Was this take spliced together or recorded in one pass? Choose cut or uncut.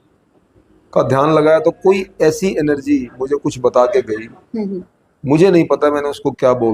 uncut